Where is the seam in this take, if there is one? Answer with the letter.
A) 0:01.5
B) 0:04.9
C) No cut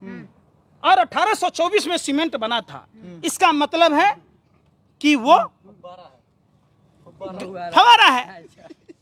C